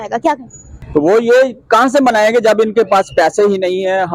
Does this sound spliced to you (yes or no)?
no